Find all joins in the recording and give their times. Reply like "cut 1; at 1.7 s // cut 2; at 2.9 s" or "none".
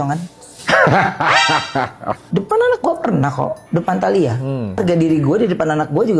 cut 1; at 2.2 s // cut 2; at 4.8 s